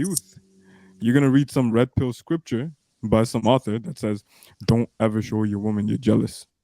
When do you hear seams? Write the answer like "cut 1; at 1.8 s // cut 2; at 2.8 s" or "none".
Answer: cut 1; at 3.4 s